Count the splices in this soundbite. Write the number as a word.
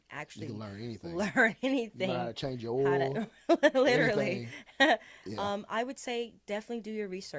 zero